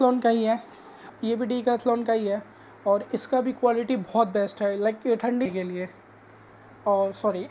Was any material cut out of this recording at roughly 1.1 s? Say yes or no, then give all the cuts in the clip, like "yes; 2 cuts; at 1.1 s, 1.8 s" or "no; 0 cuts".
yes; 2 cuts; at 1.1 s, 5.5 s